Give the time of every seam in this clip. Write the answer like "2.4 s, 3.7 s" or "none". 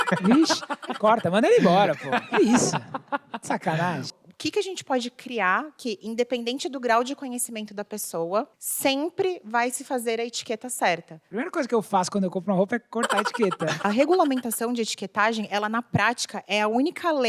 4.1 s, 8.6 s, 11.2 s, 13.7 s